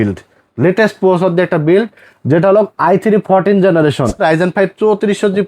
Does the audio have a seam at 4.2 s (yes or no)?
yes